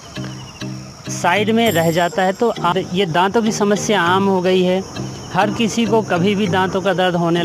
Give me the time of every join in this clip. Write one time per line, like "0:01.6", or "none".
0:02.7